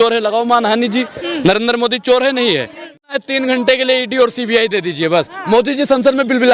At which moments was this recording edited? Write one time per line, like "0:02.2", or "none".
0:03.0